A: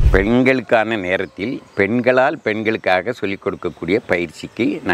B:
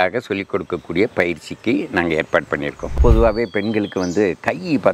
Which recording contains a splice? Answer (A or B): B